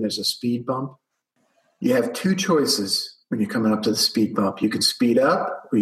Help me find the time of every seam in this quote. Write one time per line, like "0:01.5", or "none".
0:01.3